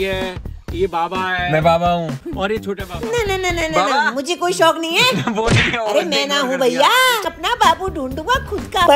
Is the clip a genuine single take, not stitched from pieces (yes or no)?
no